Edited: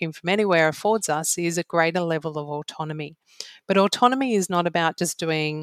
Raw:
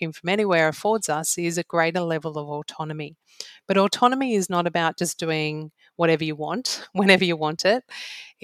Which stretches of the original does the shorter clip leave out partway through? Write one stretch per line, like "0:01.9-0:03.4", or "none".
none